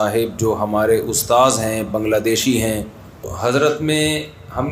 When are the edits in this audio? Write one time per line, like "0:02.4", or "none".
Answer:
0:03.3